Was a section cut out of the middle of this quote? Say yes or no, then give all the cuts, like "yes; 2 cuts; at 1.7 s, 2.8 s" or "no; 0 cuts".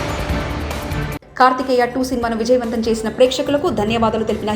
yes; 1 cut; at 1.1 s